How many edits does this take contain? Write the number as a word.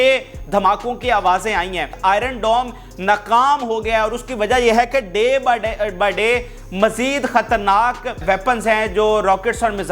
two